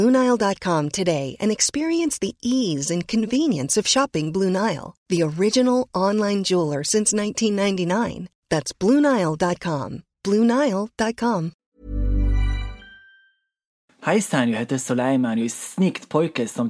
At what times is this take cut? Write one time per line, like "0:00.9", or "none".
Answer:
0:11.6
0:13.8